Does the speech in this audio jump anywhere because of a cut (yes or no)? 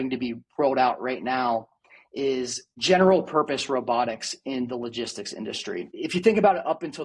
yes